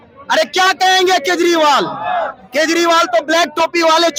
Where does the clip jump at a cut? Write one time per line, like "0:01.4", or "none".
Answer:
none